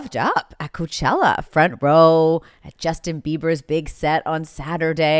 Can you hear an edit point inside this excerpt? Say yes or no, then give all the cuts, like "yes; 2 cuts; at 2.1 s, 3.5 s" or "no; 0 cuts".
no; 0 cuts